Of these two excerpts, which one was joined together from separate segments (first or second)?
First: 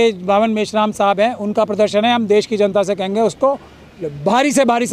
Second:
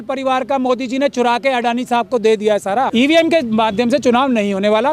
second